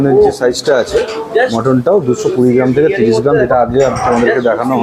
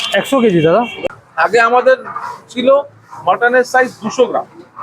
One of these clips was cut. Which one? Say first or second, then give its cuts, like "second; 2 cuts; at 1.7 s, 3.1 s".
second; 1 cut; at 1.0 s